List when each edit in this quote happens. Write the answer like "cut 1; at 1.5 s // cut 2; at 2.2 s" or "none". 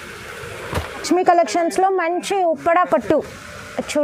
cut 1; at 1.0 s